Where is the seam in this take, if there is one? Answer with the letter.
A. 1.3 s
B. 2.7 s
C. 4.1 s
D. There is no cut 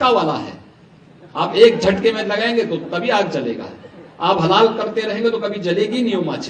D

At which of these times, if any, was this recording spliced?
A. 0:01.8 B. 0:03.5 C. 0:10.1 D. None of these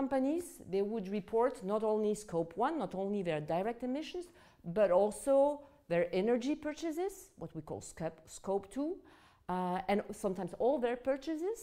C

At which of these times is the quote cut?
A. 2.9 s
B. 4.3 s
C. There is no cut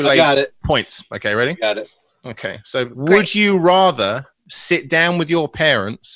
A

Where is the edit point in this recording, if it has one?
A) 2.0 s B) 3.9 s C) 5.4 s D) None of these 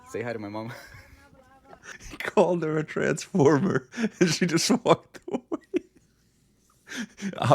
A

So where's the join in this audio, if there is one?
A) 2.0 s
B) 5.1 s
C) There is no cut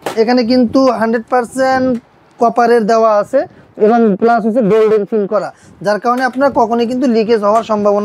C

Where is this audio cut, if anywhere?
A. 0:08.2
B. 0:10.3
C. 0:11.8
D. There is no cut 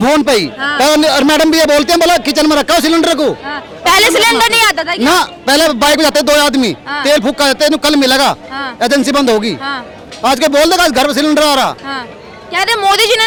D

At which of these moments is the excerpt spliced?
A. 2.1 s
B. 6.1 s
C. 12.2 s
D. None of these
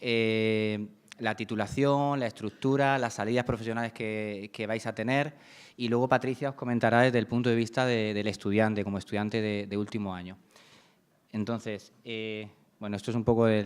C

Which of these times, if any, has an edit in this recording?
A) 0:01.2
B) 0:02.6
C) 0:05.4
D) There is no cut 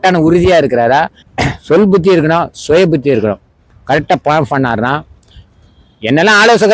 A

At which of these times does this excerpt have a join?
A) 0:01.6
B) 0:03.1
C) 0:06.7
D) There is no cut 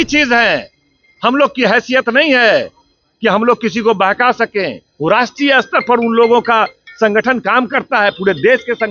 D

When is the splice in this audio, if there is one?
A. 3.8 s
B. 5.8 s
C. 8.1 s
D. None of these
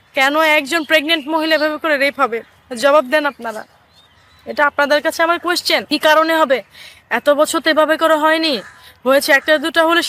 B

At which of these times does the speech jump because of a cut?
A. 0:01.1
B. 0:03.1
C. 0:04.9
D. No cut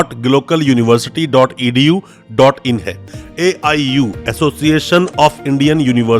B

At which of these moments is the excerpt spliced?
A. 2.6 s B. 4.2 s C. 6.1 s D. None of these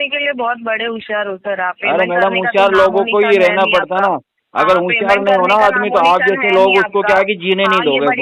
D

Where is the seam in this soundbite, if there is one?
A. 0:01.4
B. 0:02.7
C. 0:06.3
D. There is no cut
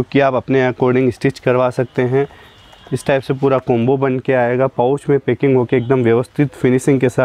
D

